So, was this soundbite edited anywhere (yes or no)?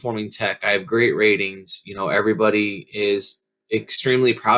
no